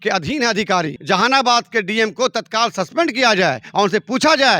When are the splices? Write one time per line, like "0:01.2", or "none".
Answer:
0:01.0